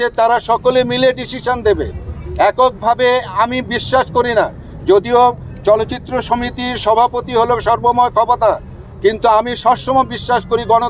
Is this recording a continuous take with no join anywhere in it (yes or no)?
yes